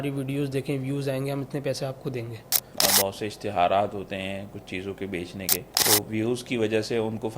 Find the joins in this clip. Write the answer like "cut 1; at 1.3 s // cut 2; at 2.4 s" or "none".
cut 1; at 2.6 s // cut 2; at 5.7 s